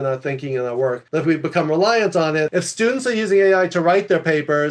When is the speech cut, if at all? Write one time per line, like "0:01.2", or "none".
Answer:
0:01.0
0:02.5